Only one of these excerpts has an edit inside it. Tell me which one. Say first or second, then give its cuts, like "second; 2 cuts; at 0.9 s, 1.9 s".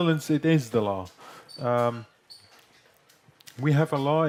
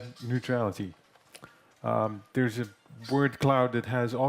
second; 1 cut; at 2.4 s